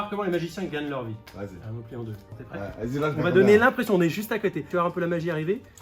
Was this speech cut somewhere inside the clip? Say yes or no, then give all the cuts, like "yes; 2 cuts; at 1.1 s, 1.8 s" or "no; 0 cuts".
yes; 2 cuts; at 2.3 s, 4.7 s